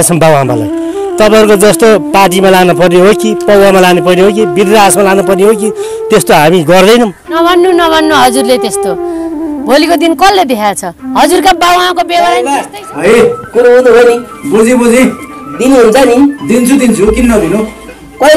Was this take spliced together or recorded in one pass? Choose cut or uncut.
cut